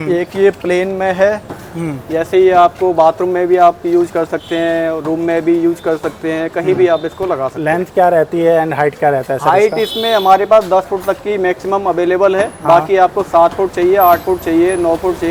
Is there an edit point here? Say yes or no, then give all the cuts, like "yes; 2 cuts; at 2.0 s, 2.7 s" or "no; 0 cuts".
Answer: no; 0 cuts